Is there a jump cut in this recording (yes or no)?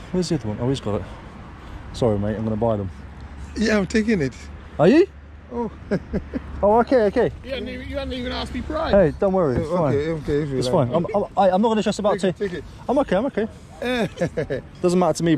no